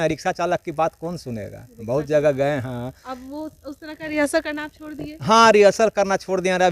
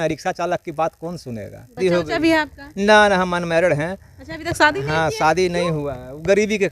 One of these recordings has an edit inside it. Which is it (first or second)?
second